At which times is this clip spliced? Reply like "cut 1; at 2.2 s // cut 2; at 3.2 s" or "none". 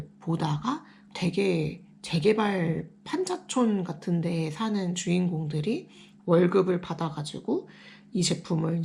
cut 1; at 0.9 s